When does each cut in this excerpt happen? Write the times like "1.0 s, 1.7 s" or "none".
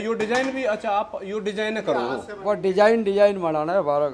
none